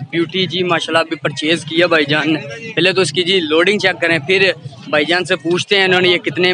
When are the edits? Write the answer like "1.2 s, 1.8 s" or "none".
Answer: none